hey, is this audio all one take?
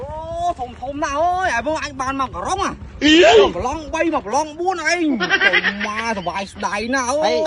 yes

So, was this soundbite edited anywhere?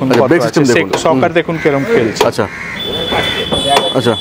no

